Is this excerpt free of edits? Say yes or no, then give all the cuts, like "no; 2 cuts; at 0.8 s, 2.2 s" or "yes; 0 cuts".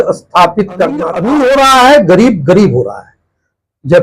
no; 1 cut; at 1.2 s